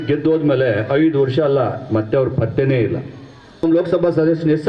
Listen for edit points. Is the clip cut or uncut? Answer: cut